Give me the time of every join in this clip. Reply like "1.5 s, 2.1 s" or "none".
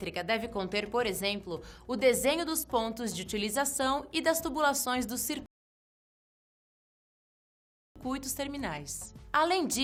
none